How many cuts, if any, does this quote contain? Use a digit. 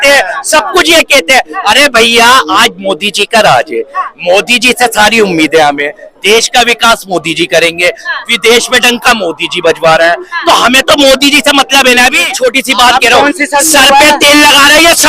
1